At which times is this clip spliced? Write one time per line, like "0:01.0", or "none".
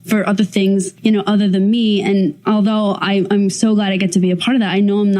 0:00.9
0:02.4